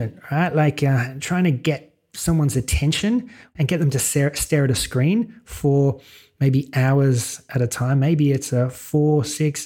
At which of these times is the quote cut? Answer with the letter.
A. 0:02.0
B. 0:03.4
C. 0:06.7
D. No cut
B